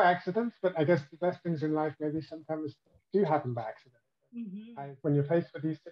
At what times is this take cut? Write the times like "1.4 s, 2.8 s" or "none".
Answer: 4.6 s

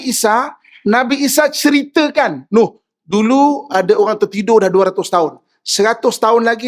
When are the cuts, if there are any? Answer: none

